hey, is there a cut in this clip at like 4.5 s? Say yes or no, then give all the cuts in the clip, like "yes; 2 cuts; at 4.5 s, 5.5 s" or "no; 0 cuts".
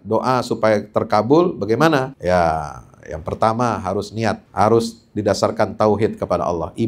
yes; 2 cuts; at 2.1 s, 4.5 s